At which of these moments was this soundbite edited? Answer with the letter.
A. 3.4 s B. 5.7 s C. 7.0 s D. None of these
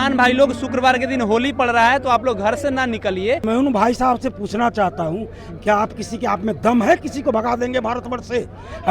A